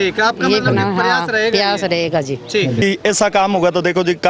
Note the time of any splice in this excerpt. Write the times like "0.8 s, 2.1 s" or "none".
2.8 s